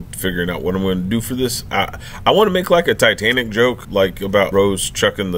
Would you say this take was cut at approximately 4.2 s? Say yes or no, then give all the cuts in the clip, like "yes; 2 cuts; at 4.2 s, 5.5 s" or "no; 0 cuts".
yes; 1 cut; at 4.2 s